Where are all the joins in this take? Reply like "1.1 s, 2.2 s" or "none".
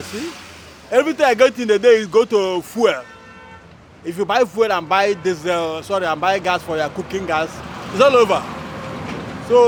none